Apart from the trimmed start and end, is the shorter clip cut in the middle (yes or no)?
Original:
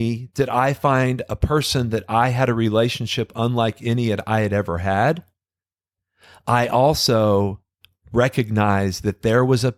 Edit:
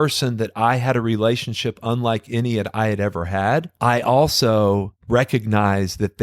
yes